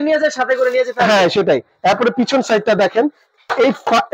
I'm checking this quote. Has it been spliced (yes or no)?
no